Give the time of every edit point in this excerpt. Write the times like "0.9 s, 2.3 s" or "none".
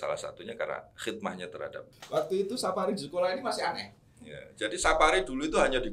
1.9 s